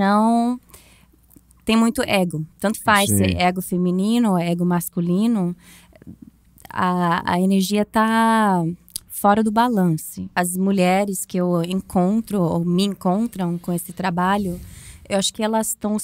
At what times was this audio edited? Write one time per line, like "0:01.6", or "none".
0:10.2